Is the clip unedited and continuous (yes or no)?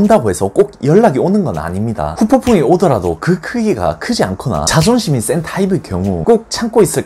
no